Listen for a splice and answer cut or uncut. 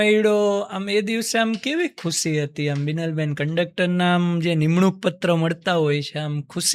uncut